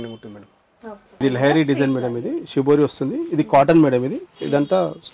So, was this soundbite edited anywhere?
yes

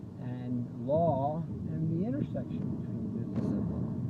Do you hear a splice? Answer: yes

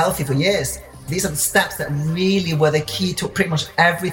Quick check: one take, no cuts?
no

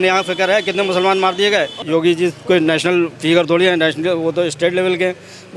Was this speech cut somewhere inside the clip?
yes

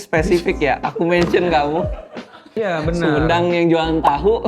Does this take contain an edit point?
yes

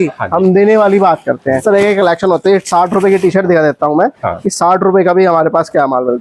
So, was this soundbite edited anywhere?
yes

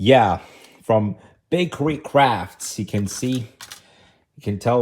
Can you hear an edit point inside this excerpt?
no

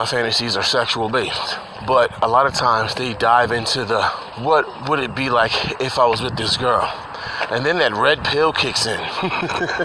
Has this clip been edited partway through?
yes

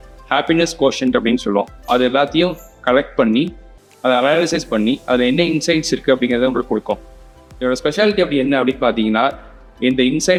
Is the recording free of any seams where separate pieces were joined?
yes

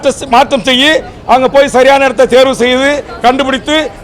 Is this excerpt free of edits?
yes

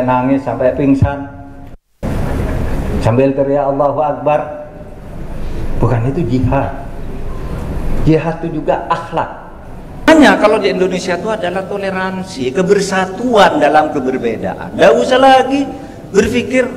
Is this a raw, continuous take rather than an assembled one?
no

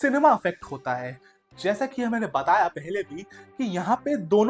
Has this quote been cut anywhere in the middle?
no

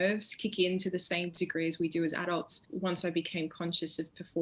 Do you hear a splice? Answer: yes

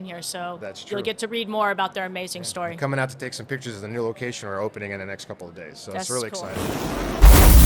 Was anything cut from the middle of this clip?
yes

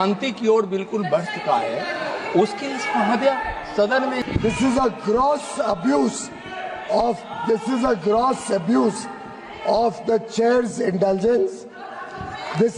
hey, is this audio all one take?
no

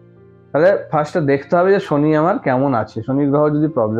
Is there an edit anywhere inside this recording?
no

